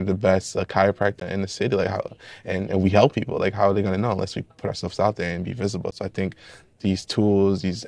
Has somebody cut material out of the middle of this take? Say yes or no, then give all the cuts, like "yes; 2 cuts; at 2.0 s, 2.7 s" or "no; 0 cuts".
yes; 1 cut; at 1.2 s